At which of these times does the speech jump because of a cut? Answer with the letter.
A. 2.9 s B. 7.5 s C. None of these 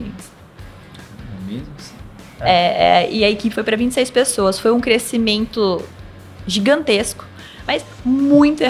C